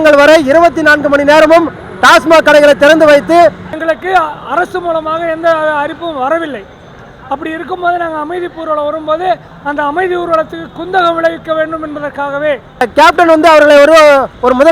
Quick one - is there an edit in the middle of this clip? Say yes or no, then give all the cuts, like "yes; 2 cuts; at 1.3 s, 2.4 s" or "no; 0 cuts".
yes; 2 cuts; at 3.7 s, 12.9 s